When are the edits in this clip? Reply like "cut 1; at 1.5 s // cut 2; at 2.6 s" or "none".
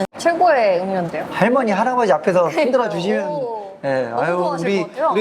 none